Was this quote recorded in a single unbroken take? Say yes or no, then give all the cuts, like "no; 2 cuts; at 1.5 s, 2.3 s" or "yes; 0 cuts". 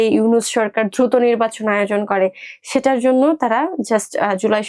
yes; 0 cuts